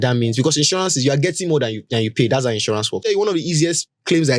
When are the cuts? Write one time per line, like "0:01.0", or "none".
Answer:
0:03.0